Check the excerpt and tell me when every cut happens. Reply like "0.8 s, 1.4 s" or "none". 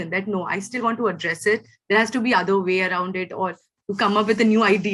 none